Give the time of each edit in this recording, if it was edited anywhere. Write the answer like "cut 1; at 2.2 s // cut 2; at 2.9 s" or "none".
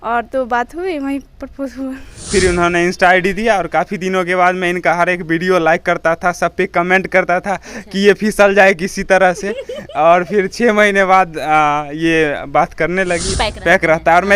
cut 1; at 2.1 s // cut 2; at 13.3 s